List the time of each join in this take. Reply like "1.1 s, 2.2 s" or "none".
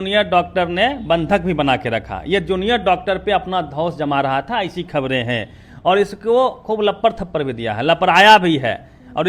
none